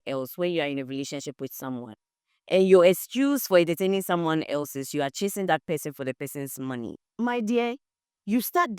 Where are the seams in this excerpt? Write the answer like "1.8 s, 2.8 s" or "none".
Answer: 7.0 s